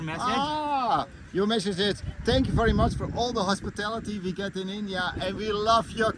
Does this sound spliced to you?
no; 0 cuts

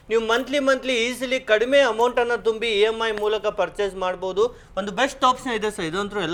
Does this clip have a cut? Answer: no; 0 cuts

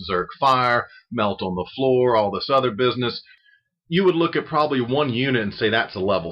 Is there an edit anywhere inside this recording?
yes; 1 cut; at 2.6 s

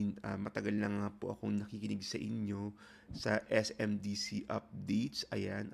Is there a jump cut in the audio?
no; 0 cuts

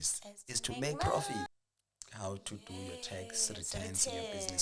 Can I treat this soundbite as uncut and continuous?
no; 1 cut; at 1.5 s

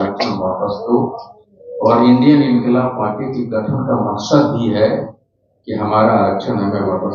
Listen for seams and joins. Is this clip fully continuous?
yes; 0 cuts

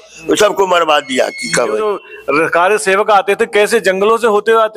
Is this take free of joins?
yes; 0 cuts

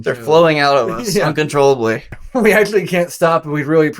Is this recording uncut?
no; 1 cut; at 2.1 s

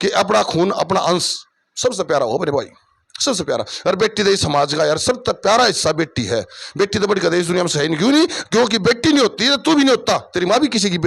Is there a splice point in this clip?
no; 0 cuts

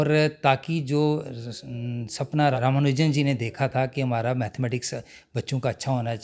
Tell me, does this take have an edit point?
yes; 1 cut; at 2.5 s

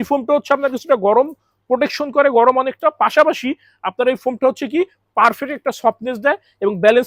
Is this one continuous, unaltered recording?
yes; 0 cuts

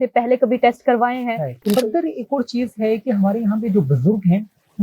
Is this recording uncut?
no; 1 cut; at 1.5 s

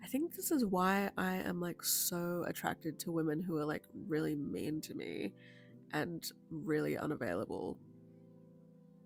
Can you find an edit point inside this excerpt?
no; 0 cuts

